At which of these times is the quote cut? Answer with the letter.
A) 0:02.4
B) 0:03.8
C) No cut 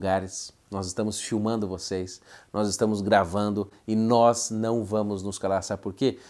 C